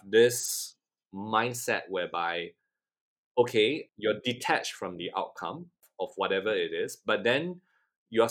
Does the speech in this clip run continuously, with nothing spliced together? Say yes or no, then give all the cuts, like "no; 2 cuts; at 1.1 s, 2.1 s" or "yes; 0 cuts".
yes; 0 cuts